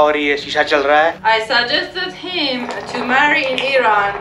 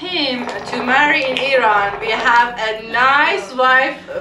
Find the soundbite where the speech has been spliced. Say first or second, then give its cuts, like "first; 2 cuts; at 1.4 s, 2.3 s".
first; 1 cut; at 1.2 s